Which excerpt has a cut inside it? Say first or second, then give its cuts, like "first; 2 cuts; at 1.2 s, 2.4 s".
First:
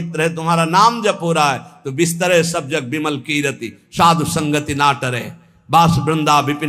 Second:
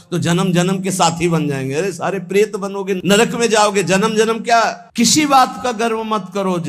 second; 1 cut; at 4.8 s